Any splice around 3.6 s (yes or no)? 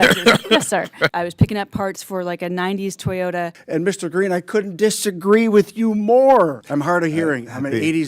yes